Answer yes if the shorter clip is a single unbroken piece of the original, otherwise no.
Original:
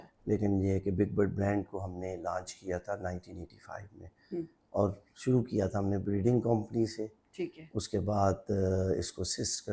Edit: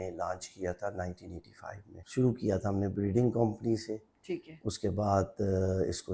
no